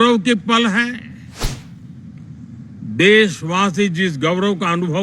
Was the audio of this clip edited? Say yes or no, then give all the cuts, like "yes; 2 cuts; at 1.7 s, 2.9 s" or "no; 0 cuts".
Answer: yes; 1 cut; at 1.6 s